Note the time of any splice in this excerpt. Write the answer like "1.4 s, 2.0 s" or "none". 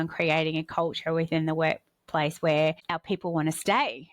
2.9 s

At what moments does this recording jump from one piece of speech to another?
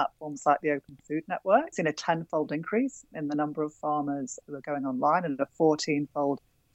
1.7 s, 4.4 s

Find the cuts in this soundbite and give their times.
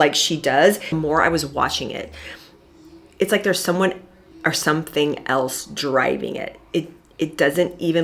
0.9 s

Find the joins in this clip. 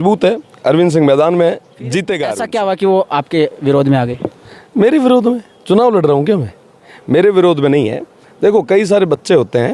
2.3 s

